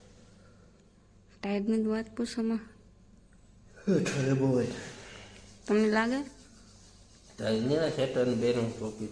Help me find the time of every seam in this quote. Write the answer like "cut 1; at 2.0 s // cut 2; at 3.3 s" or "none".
none